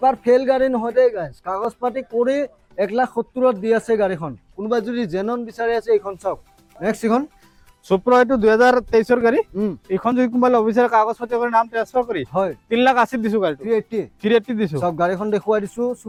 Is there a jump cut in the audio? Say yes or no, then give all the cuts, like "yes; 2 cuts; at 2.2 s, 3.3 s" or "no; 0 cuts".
no; 0 cuts